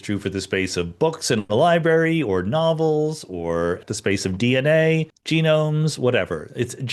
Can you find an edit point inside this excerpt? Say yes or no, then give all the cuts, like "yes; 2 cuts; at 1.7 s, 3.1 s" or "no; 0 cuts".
yes; 2 cuts; at 3.8 s, 5.2 s